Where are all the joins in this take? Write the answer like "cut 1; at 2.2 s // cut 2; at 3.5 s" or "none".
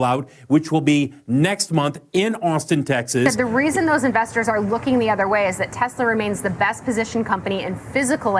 cut 1; at 3.3 s